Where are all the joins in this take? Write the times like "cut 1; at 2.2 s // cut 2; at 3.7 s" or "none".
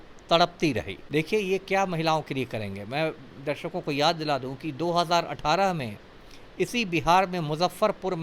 cut 1; at 0.9 s